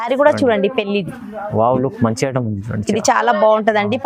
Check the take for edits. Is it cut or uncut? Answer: uncut